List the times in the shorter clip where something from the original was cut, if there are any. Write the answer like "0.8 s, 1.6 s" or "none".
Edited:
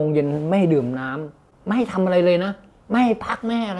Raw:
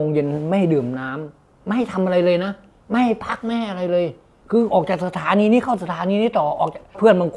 none